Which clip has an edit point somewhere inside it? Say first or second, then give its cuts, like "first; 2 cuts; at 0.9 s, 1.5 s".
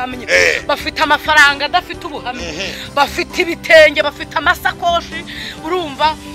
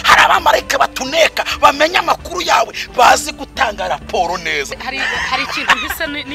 second; 1 cut; at 4.7 s